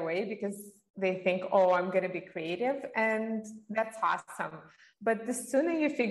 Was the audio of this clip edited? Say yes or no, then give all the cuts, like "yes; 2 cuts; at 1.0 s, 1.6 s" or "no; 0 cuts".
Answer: no; 0 cuts